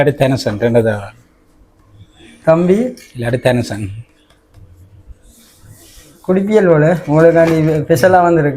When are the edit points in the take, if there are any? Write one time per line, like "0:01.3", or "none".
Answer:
none